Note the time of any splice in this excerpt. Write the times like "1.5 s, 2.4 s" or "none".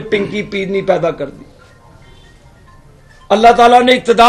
none